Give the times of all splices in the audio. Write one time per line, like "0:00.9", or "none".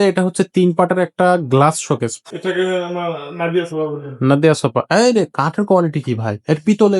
0:02.2